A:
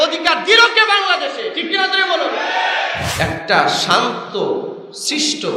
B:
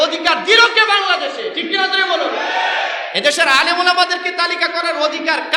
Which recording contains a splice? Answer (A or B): A